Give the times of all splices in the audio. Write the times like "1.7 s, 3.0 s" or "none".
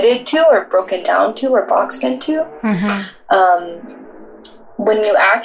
none